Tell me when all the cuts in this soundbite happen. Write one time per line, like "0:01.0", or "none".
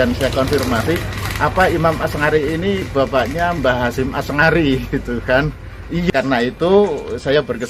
0:06.1